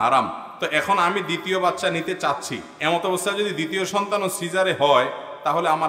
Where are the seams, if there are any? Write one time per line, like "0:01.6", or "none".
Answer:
none